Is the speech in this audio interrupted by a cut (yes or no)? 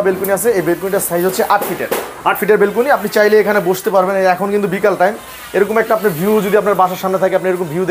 yes